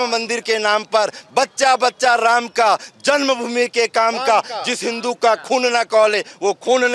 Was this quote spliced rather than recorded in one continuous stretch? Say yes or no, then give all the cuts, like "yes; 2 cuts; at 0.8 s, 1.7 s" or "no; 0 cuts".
no; 0 cuts